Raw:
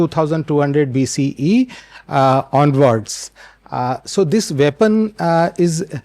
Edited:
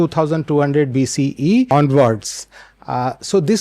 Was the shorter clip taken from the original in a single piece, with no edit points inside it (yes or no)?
no